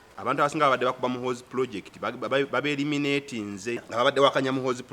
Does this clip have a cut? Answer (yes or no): yes